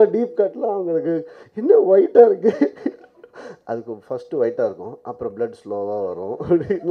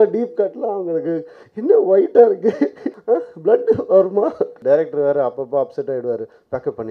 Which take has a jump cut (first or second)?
second